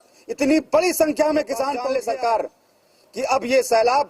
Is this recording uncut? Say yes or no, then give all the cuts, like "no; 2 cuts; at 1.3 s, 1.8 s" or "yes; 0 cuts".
no; 1 cut; at 1.9 s